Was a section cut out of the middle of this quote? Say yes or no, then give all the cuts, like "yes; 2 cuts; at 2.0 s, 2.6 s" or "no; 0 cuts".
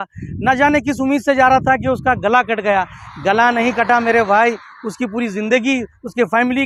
no; 0 cuts